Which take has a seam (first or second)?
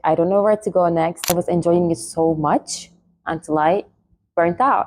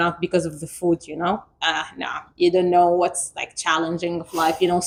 first